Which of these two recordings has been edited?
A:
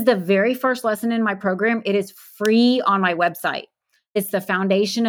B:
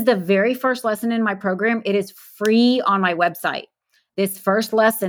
A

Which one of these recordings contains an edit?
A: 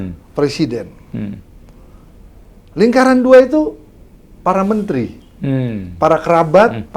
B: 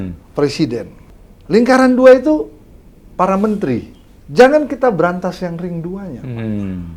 B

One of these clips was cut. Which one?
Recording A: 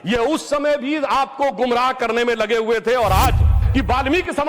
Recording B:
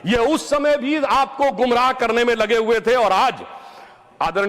A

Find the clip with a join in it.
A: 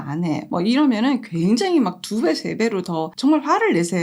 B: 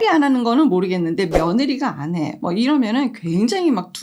A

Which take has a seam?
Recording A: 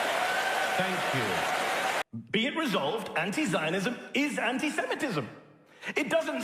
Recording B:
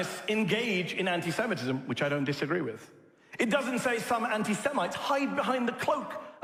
A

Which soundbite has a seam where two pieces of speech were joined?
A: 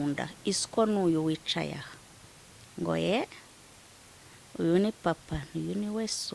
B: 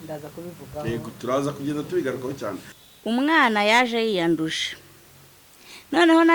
B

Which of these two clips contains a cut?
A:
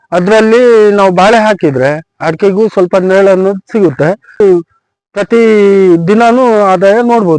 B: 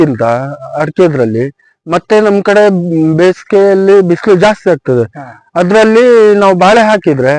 A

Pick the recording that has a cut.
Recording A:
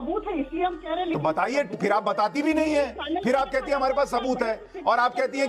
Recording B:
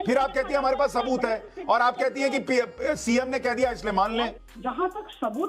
B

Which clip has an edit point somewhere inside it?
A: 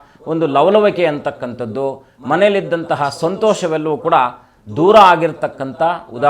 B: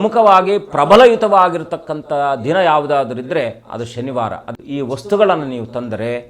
B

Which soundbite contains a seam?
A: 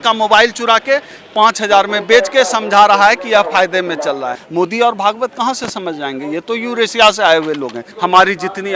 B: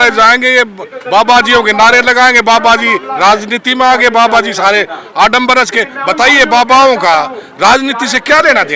A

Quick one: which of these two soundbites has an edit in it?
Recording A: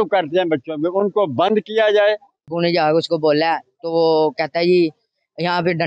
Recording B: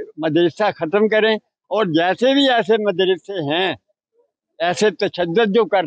A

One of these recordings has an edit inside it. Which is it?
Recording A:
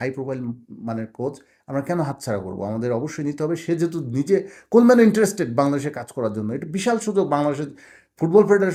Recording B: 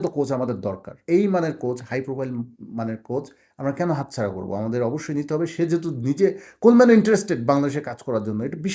B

